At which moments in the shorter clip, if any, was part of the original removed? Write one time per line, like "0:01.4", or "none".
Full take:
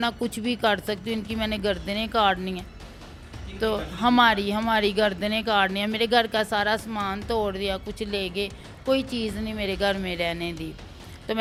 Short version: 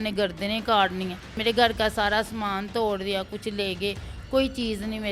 0:01.4